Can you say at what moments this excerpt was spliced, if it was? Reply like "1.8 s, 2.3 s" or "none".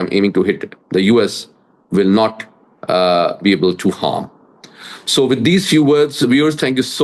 none